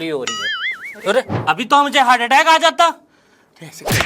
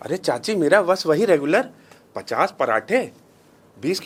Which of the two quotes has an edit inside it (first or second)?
first